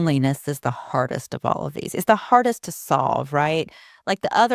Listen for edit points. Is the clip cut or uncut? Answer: uncut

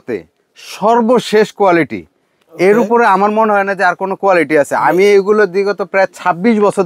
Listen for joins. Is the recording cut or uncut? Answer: uncut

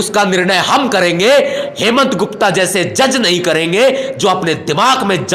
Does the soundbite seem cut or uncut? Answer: uncut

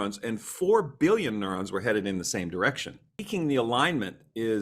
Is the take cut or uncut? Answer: cut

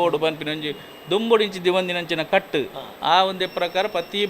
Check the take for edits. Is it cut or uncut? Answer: uncut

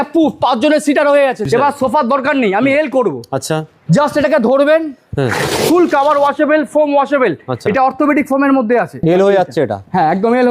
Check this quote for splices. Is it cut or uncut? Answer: cut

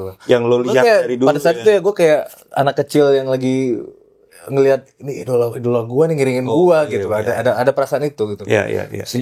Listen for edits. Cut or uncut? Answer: uncut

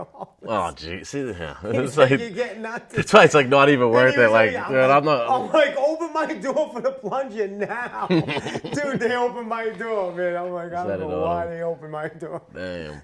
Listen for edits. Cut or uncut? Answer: uncut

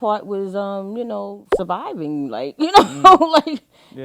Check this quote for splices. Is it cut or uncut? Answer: uncut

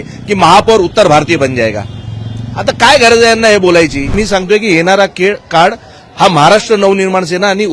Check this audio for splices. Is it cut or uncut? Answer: cut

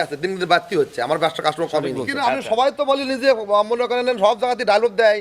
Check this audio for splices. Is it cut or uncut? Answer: cut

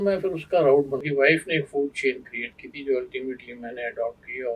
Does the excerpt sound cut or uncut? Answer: cut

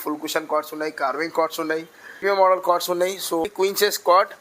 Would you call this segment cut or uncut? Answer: cut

